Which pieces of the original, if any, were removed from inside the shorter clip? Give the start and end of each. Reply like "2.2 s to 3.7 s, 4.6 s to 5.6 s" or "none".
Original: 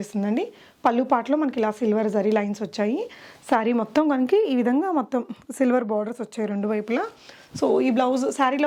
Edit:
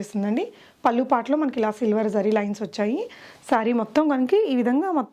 none

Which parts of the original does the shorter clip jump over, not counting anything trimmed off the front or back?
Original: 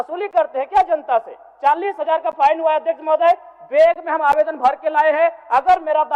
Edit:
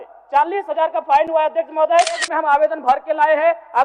3.6 s to 4.0 s

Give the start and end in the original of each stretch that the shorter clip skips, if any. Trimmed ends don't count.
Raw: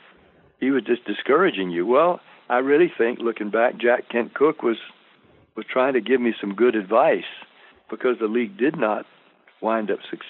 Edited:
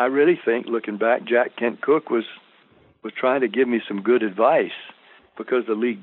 none

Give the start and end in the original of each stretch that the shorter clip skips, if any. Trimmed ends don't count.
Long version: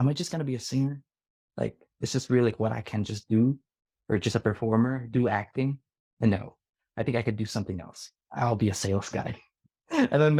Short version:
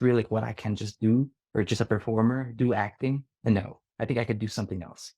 3.7 s to 3.9 s, 6.1 s to 6.5 s

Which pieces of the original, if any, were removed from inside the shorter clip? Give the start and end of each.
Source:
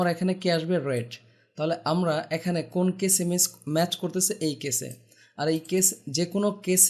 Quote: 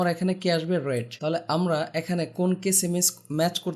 1.1 s to 1.5 s

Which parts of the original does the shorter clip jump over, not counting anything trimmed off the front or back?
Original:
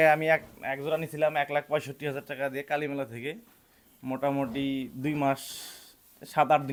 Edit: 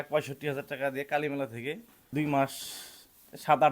3.6 s to 4.9 s

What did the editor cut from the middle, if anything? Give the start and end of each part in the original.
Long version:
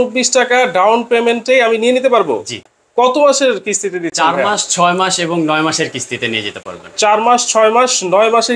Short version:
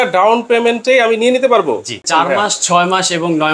2.6 s to 4.1 s

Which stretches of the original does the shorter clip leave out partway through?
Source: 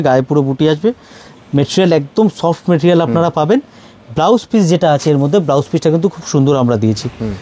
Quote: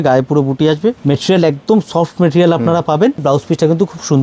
1.0 s to 1.5 s, 3.7 s to 5.5 s

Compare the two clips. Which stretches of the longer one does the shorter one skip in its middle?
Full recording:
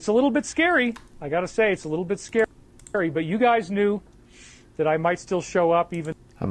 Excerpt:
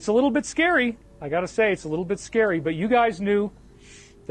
2.5 s to 3.0 s

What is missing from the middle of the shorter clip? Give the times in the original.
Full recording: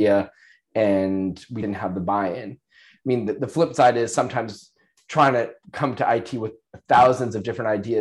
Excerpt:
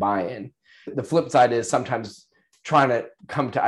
3.0 s to 3.4 s

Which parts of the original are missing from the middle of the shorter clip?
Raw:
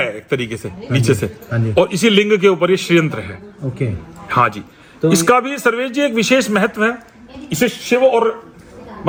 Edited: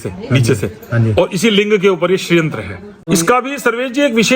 3.7 s to 5.1 s

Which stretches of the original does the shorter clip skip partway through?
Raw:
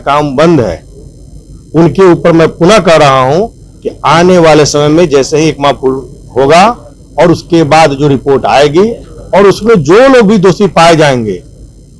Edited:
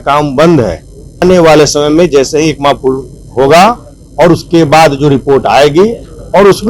1.2 s to 4.2 s

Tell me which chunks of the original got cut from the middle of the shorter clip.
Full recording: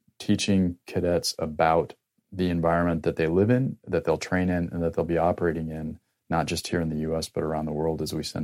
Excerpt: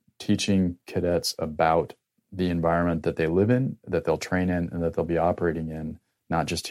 none

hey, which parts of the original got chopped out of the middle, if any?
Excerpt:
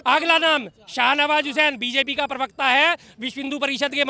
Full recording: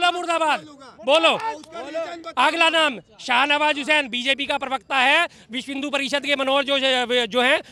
none

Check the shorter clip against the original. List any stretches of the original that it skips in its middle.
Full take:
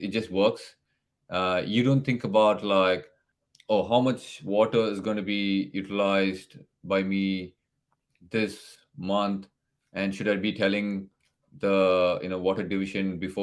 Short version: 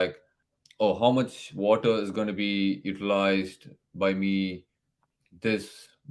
none

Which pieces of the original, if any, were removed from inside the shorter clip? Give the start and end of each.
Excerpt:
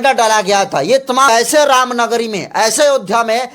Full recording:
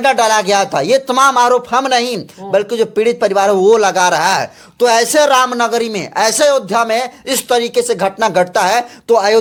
1.3 s to 4.9 s

